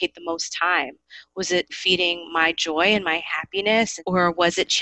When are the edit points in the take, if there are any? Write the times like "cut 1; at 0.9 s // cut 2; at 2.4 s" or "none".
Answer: cut 1; at 1.8 s // cut 2; at 4.0 s